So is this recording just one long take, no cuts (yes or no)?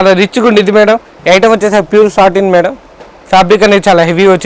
no